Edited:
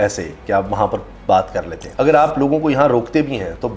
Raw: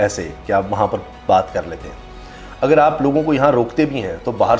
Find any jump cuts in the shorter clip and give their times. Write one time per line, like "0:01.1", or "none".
0:01.8